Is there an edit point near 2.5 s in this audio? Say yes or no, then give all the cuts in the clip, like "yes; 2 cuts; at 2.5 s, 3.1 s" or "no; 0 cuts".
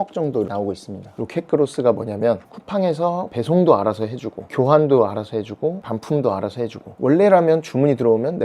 yes; 3 cuts; at 1.2 s, 2.5 s, 6.8 s